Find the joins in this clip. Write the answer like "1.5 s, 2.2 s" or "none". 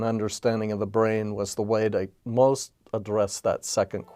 2.2 s